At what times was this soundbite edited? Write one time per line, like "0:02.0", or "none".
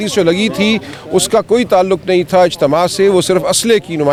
none